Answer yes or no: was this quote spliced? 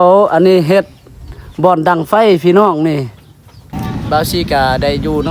yes